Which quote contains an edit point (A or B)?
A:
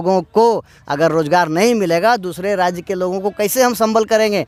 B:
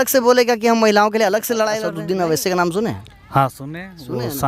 B